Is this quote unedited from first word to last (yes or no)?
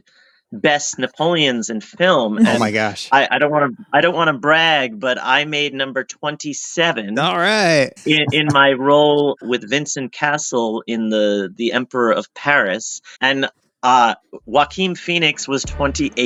yes